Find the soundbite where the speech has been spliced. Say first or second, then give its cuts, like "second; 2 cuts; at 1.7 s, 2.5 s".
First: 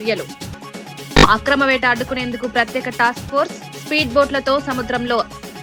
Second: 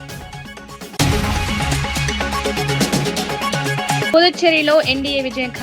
second; 2 cuts; at 1.0 s, 4.1 s